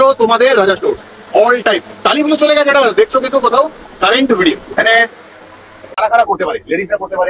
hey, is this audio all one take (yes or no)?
no